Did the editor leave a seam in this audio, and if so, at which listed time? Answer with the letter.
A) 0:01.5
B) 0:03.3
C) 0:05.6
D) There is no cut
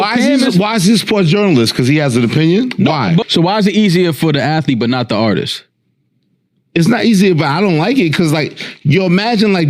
B